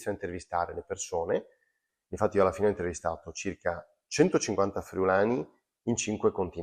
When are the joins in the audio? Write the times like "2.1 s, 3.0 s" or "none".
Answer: 1.9 s